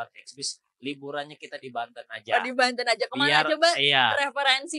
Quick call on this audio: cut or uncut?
uncut